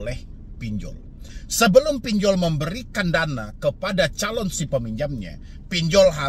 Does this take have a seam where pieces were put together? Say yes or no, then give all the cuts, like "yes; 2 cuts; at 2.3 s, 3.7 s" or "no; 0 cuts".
no; 0 cuts